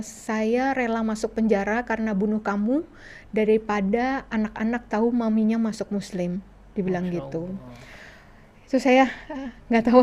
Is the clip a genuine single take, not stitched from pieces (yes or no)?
yes